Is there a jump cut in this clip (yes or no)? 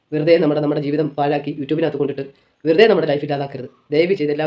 no